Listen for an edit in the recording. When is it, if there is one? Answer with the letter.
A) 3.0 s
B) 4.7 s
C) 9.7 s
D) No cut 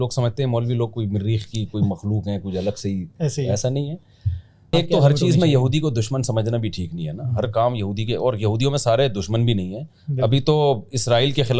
B